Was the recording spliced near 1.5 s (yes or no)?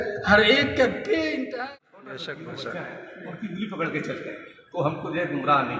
yes